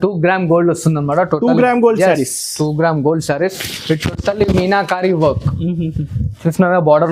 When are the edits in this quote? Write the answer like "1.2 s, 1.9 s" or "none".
none